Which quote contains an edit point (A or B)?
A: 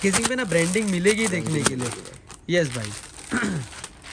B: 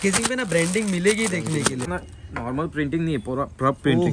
B